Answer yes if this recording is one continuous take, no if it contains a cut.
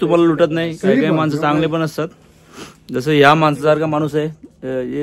yes